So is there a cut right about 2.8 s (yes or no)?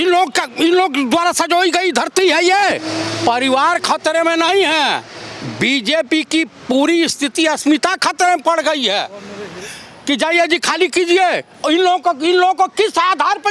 yes